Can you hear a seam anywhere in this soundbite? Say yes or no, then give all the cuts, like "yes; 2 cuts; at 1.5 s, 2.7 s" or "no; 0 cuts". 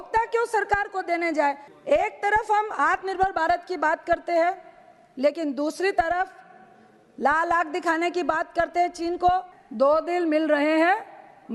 yes; 2 cuts; at 1.7 s, 9.6 s